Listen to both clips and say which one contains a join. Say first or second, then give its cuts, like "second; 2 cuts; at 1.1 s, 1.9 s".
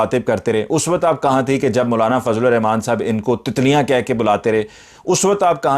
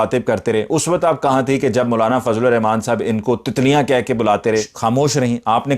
second; 1 cut; at 4.7 s